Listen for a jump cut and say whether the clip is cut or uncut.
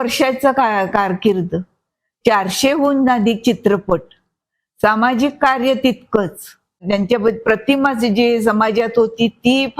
cut